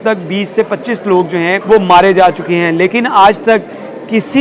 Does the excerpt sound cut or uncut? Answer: cut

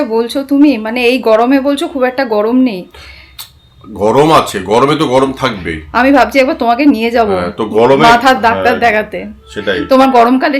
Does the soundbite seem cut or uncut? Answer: uncut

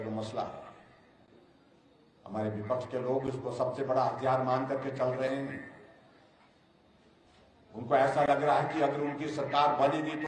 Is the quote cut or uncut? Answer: uncut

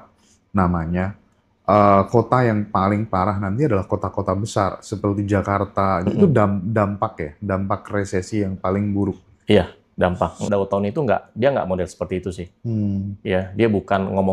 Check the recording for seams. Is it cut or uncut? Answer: cut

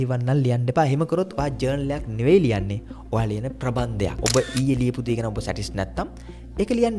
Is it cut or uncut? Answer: cut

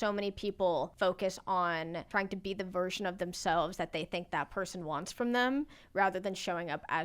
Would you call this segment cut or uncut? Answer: cut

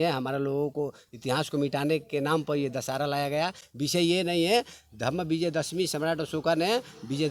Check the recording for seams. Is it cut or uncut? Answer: uncut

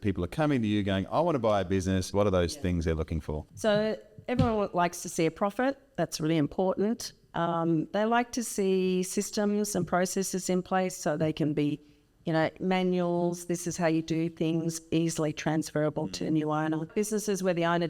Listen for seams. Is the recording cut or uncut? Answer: cut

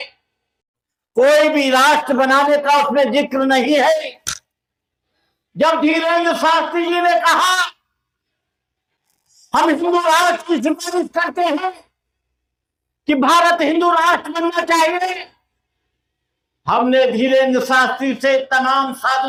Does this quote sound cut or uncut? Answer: uncut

